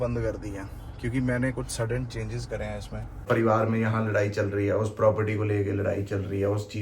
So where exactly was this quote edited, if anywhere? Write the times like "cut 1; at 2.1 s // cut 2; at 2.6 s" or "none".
cut 1; at 3.2 s